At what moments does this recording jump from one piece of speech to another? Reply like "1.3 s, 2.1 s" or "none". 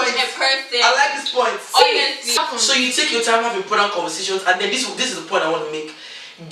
2.4 s